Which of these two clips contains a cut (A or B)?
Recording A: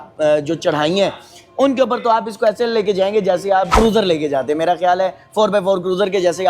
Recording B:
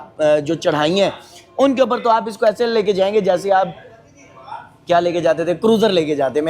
A